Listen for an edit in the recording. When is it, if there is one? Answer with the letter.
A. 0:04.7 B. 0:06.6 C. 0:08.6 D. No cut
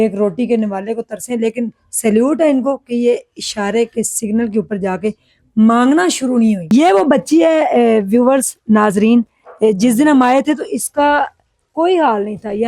B